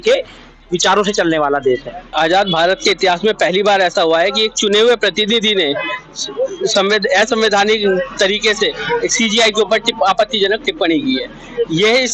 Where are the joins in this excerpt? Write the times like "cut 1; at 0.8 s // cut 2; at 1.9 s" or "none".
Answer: cut 1; at 2.0 s